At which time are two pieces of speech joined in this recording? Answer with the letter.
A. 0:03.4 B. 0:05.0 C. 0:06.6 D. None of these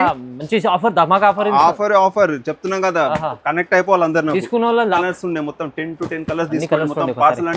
B